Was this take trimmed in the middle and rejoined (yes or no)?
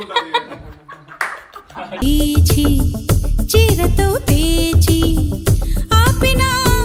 no